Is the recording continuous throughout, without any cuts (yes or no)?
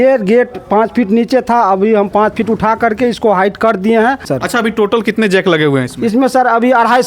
no